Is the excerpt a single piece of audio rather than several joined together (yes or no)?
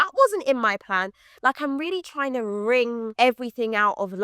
no